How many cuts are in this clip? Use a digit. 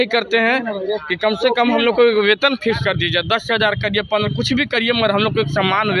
0